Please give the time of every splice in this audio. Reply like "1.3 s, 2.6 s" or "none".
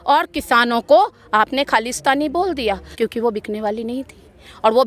2.9 s